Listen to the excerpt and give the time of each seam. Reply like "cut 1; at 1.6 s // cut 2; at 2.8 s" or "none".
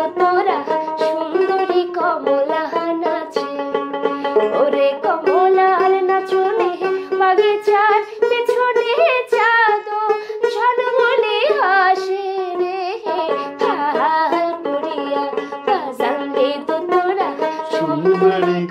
none